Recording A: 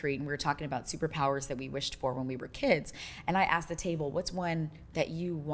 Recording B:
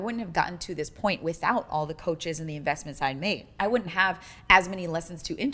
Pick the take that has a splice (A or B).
B